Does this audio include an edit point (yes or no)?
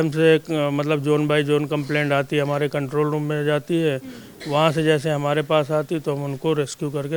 no